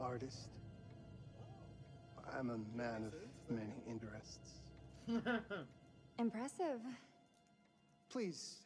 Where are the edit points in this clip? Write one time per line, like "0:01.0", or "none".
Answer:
none